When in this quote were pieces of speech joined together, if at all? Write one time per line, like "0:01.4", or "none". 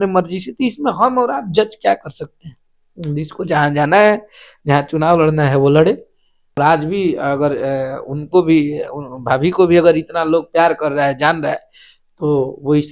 0:06.6